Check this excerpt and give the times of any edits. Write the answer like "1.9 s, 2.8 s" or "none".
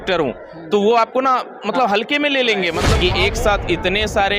2.9 s

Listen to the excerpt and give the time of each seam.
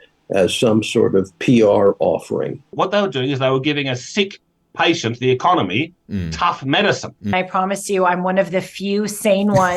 2.7 s, 7.3 s

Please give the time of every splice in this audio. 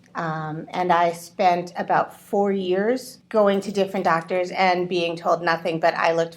3.1 s

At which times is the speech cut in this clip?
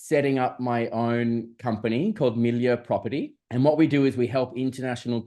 3.4 s

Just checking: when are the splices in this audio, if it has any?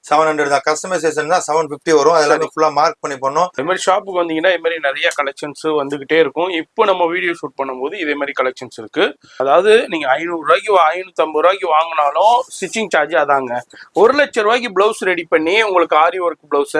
3.6 s, 9.3 s

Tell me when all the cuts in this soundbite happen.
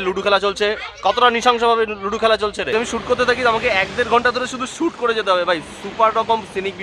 2.7 s

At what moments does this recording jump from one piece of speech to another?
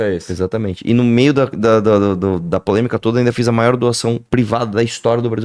4.2 s

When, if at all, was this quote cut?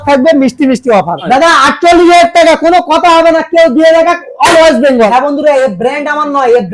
1.2 s, 5.1 s

